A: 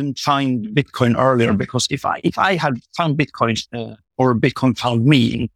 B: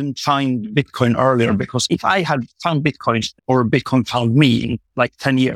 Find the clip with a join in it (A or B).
B